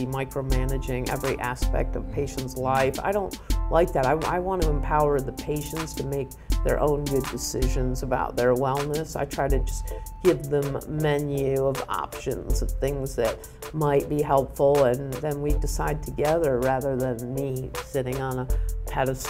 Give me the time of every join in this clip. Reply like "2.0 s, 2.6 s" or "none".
none